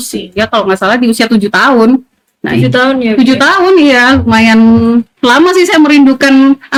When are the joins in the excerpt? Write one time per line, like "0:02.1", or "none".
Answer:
none